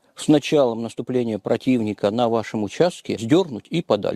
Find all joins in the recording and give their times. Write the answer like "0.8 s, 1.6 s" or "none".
3.2 s